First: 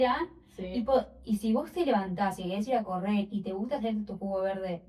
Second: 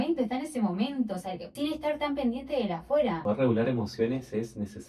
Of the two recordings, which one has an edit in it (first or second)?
second